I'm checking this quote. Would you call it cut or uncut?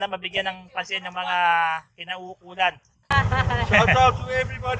cut